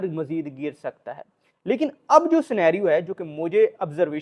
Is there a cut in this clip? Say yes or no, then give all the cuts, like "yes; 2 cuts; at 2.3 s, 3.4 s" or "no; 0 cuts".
no; 0 cuts